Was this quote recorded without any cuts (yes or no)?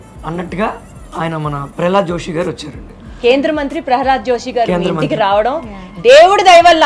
yes